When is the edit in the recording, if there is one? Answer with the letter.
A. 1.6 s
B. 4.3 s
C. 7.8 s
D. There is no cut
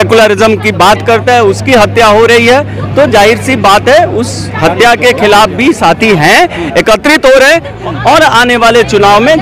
C